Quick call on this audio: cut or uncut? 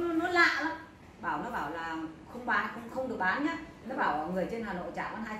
cut